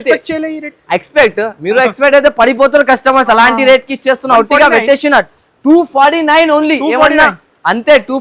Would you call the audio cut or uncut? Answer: uncut